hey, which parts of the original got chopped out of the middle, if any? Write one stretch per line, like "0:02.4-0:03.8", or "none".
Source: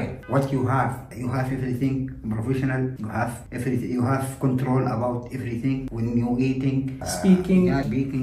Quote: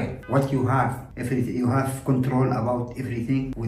0:01.1-0:03.4